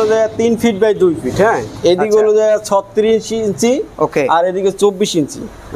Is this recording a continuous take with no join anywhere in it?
yes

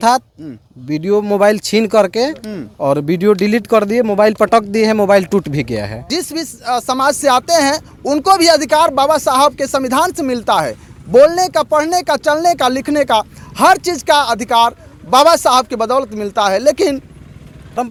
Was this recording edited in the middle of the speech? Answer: no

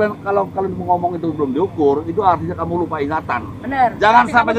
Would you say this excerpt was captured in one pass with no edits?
yes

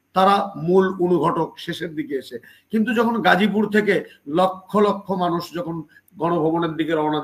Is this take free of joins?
yes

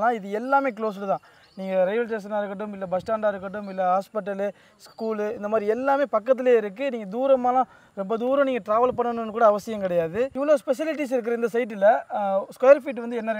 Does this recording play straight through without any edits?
yes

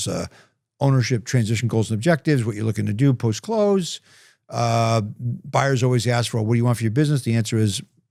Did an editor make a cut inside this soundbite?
no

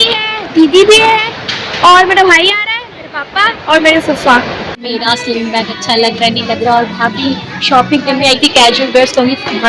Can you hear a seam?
yes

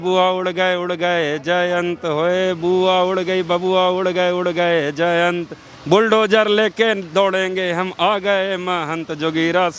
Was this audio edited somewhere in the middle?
no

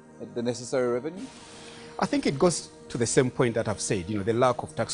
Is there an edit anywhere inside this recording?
yes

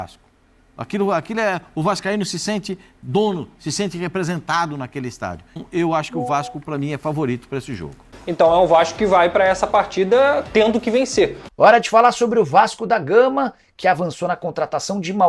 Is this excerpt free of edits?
no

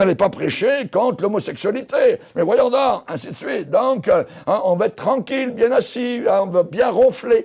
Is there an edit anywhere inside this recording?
no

